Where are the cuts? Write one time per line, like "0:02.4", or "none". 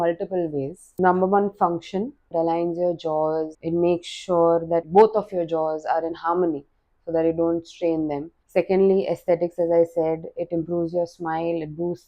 0:00.9
0:02.3
0:03.6
0:04.9
0:08.3